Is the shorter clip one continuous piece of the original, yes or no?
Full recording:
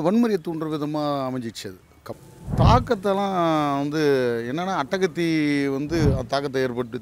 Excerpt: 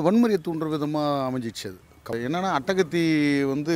no